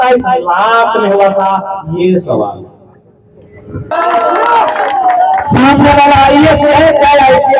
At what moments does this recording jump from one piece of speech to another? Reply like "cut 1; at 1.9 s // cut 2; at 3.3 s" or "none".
cut 1; at 3.9 s